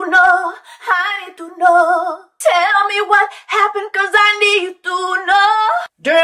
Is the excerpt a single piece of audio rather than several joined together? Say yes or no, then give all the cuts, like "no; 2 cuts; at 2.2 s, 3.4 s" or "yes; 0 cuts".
no; 1 cut; at 2.2 s